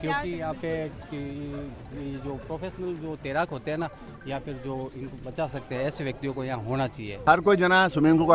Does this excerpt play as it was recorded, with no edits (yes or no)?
no